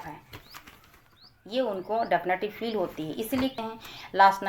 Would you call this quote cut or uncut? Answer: cut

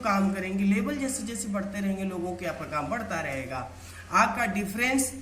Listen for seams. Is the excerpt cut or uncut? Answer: uncut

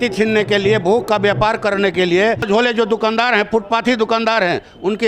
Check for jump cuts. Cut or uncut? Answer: cut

